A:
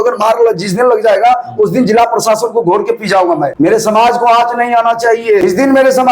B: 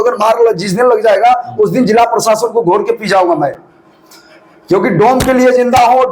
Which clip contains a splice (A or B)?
A